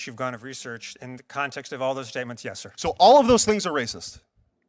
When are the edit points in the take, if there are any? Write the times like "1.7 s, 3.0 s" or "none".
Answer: 2.7 s

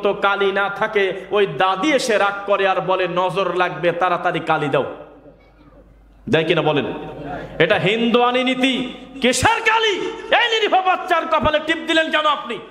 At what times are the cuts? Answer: none

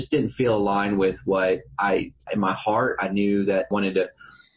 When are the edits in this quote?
2.2 s, 3.7 s

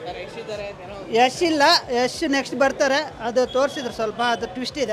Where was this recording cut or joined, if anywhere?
none

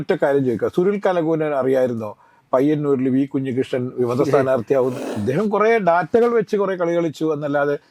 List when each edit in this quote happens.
5.1 s

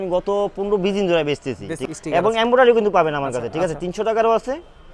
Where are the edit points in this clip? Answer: 1.7 s

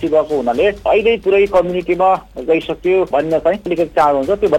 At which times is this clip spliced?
0.9 s, 3.3 s

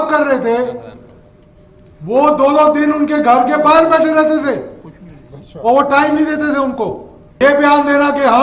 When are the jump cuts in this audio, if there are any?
7.4 s

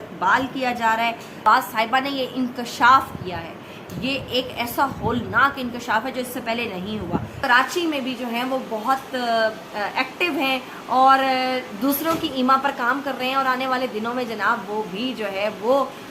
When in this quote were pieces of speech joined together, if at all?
1.4 s, 7.3 s

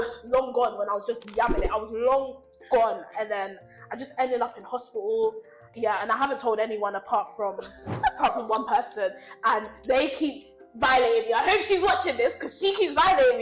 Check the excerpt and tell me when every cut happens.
5.7 s

